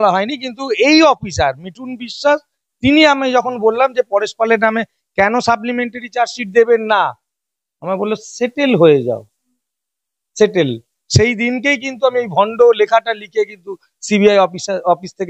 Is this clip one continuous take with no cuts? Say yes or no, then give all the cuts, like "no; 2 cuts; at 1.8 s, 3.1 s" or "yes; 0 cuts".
yes; 0 cuts